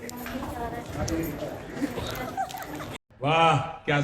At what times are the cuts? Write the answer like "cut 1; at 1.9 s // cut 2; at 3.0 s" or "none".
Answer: cut 1; at 3.0 s

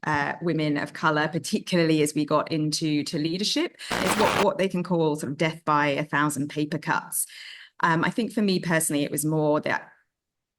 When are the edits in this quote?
cut 1; at 4.0 s

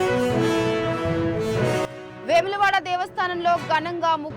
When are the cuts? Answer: none

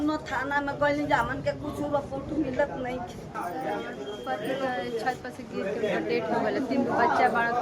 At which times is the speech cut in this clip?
cut 1; at 3.4 s

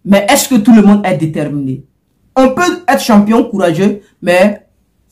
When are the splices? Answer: none

